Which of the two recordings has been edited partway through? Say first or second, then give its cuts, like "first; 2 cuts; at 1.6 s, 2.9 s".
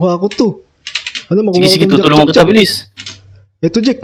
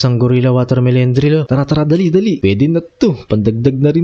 second; 2 cuts; at 1.5 s, 2.4 s